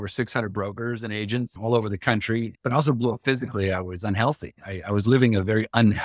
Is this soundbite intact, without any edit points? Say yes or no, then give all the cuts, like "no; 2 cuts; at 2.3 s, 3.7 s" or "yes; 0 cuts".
no; 2 cuts; at 1.5 s, 2.5 s